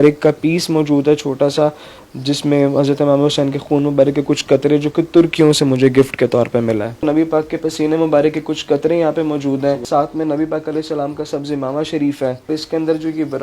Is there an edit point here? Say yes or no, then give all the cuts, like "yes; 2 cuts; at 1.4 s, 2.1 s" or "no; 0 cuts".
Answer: yes; 3 cuts; at 6.9 s, 9.8 s, 12.5 s